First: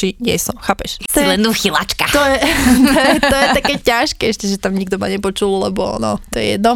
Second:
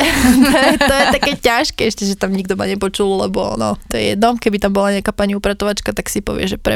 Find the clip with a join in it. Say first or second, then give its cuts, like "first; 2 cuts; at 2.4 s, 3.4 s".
first; 1 cut; at 1.1 s